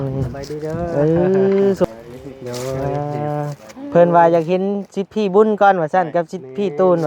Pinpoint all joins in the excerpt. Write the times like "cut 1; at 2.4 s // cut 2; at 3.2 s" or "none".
cut 1; at 1.9 s